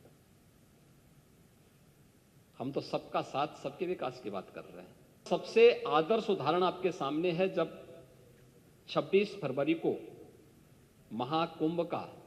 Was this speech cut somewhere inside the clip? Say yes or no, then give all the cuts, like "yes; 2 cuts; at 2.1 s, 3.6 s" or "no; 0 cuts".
yes; 1 cut; at 5.2 s